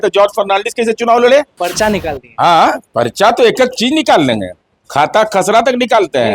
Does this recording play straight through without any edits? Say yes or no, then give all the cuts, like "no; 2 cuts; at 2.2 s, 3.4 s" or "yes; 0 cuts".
no; 1 cut; at 1.6 s